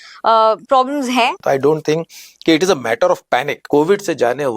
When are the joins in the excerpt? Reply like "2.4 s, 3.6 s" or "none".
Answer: 1.4 s, 3.6 s